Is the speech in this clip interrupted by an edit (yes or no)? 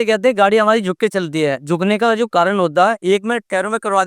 yes